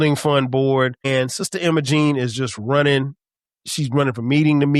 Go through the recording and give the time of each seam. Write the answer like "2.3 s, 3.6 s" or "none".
1.1 s